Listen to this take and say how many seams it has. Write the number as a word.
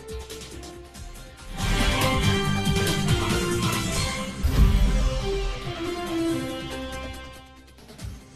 one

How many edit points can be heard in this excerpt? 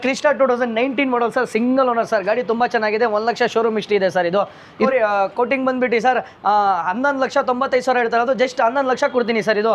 one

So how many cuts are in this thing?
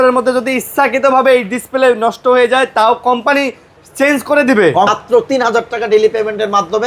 one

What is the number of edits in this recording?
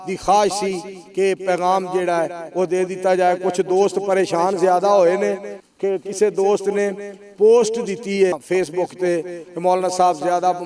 one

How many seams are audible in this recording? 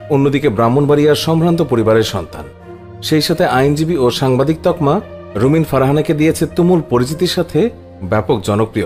zero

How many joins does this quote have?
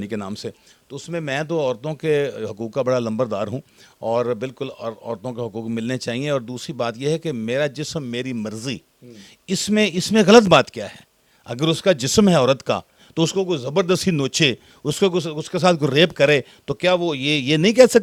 zero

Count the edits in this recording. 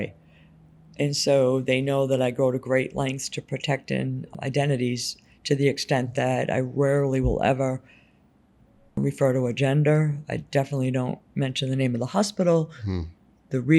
two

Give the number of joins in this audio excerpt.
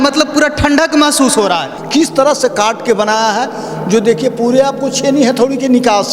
one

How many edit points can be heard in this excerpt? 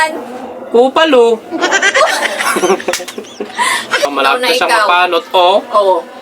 one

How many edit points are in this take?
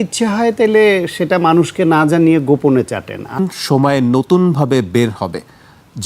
one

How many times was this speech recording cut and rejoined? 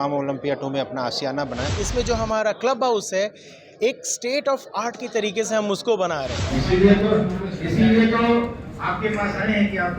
two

